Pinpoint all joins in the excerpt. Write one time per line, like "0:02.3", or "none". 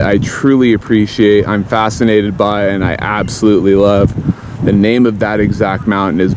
none